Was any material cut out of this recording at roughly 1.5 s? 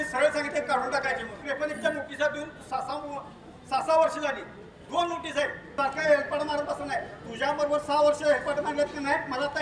yes; 2 cuts; at 1.5 s, 5.7 s

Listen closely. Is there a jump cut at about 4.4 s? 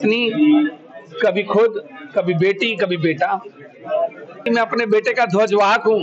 yes; 1 cut; at 4.4 s

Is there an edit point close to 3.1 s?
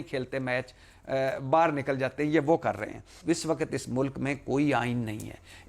yes; 1 cut; at 3.1 s

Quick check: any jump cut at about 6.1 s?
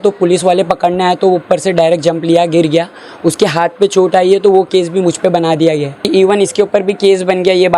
yes; 1 cut; at 6.1 s

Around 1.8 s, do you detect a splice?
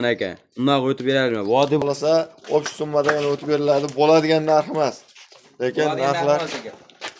yes; 1 cut; at 1.8 s

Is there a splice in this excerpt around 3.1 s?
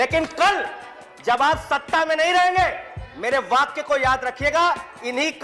no; 0 cuts

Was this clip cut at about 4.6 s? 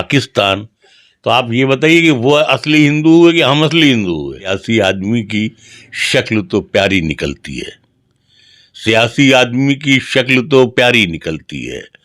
yes; 1 cut; at 4.6 s

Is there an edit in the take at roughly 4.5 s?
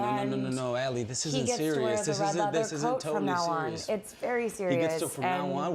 no; 0 cuts

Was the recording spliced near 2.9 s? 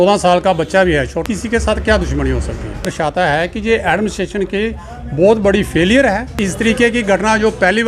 yes; 3 cuts; at 1.2 s, 2.9 s, 6.4 s

